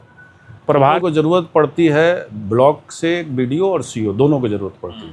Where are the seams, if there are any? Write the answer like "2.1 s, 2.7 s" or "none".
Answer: 1.0 s